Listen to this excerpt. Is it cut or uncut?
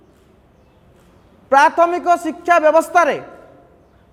uncut